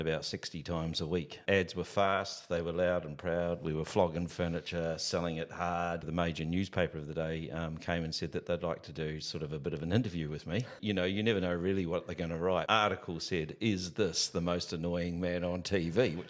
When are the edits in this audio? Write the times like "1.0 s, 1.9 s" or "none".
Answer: 1.4 s, 6.1 s, 10.8 s, 12.7 s

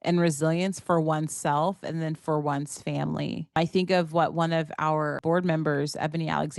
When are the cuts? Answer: 3.6 s, 5.2 s

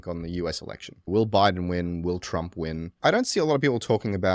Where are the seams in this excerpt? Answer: 1.1 s, 2.9 s

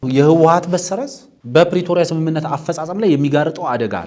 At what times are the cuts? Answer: none

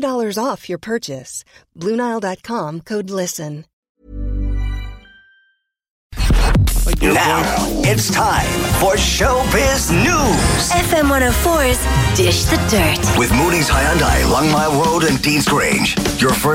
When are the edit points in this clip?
6.3 s

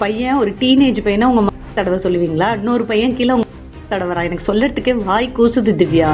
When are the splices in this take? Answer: none

